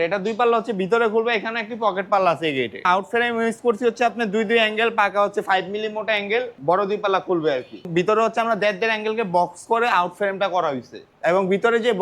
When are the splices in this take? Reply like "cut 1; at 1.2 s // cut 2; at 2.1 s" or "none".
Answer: cut 1; at 2.8 s // cut 2; at 6.5 s // cut 3; at 7.8 s // cut 4; at 11.1 s